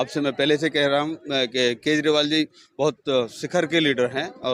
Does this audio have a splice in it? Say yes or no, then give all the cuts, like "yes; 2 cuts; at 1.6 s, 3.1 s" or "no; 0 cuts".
no; 0 cuts